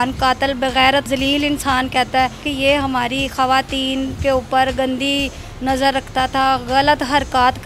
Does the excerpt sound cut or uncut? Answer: cut